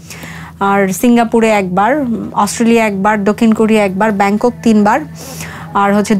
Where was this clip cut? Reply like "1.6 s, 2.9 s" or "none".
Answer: none